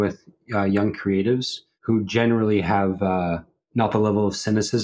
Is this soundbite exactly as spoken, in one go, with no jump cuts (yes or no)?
yes